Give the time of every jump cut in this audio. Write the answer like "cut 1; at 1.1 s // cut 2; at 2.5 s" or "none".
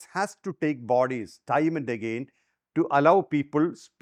none